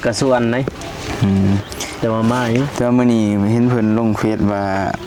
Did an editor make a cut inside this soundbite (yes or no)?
no